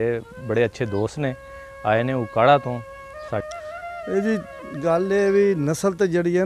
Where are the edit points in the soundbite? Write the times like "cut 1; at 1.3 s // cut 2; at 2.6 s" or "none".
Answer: cut 1; at 3.5 s